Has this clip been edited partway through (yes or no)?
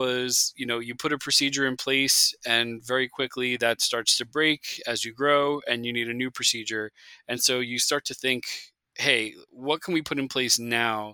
no